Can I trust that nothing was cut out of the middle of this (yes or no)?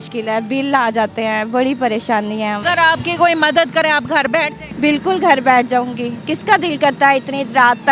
no